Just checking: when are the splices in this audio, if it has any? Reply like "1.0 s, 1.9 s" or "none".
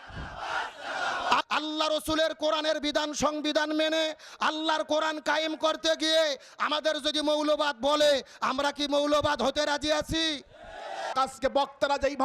1.4 s, 11.1 s